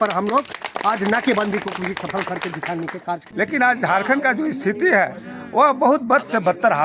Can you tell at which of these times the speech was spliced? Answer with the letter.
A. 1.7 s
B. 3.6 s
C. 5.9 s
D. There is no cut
B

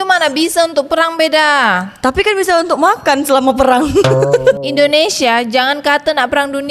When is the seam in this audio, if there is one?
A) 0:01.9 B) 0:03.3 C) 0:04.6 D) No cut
C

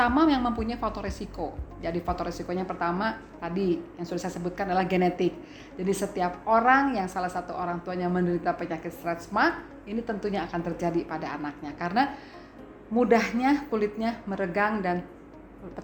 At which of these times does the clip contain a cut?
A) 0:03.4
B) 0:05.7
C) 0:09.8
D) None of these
D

